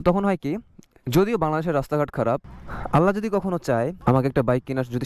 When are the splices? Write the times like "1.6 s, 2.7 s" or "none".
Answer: 2.5 s, 4.0 s